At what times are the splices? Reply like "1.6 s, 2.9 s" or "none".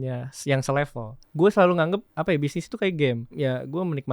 1.2 s, 2.1 s, 3.3 s

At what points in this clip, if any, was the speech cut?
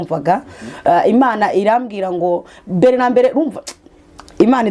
none

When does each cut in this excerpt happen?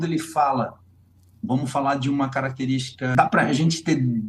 3.2 s

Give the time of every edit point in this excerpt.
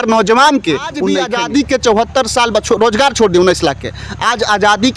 1.2 s

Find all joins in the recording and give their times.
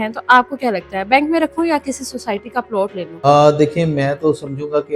3.3 s

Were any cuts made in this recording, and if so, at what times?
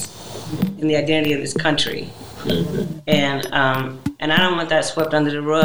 none

